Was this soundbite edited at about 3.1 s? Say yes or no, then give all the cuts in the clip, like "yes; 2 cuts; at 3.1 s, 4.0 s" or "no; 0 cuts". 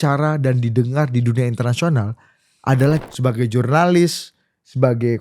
yes; 1 cut; at 3.1 s